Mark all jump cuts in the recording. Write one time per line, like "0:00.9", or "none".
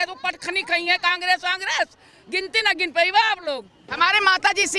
0:03.8